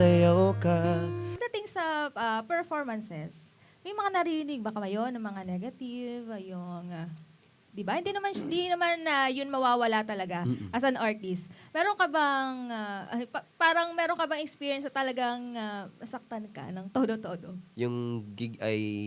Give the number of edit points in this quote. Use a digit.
2